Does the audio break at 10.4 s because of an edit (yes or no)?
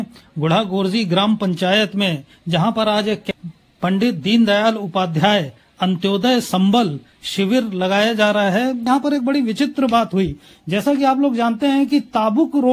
no